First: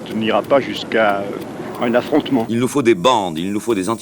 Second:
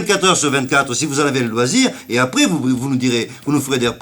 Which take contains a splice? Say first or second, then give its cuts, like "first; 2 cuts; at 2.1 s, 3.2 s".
first; 1 cut; at 2.5 s